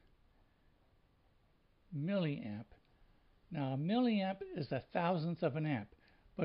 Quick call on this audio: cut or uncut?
uncut